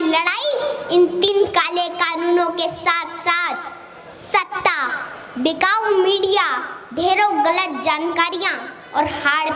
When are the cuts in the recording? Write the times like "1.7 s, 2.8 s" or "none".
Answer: 1.3 s